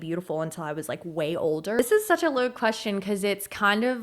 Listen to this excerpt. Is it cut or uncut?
cut